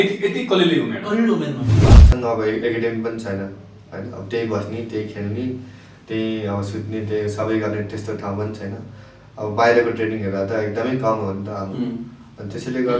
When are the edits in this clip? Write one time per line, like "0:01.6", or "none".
0:01.9